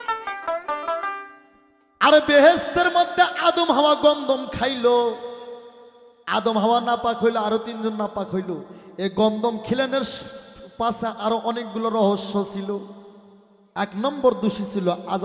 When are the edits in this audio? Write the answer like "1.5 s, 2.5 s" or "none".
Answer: none